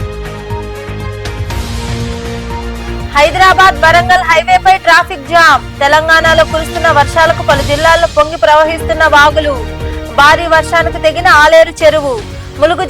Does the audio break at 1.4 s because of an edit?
yes; 1 cut; at 1.4 s

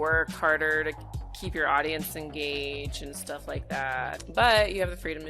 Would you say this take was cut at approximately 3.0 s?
no; 1 cut; at 4.2 s

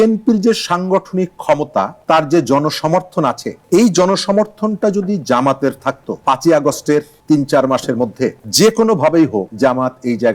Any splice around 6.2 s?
yes; 2 cuts; at 1.9 s, 6.2 s

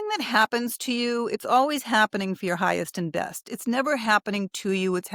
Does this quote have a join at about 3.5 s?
no; 0 cuts

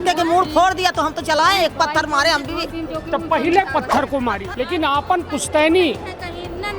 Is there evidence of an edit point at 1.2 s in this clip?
no; 1 cut; at 4.4 s

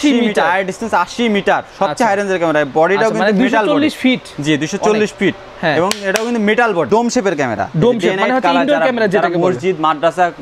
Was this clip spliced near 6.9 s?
yes; 1 cut; at 6.9 s

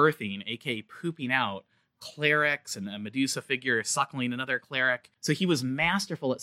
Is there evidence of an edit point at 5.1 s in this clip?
yes; 1 cut; at 5.1 s

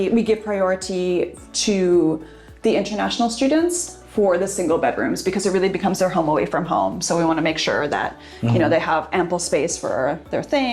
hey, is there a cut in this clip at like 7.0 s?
no; 0 cuts

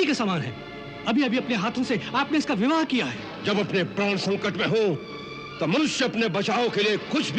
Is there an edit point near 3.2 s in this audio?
yes; 1 cut; at 3.2 s

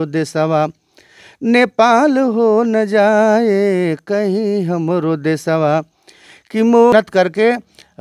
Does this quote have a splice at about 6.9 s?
yes; 1 cut; at 6.9 s

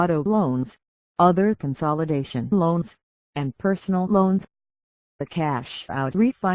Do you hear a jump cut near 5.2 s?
yes; 1 cut; at 5.2 s

